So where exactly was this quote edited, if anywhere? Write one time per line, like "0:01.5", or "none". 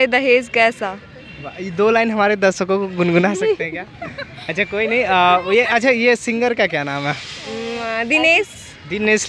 none